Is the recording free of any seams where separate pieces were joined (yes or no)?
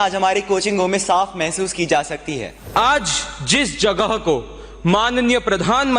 no